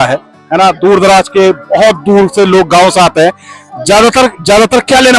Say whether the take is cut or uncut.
uncut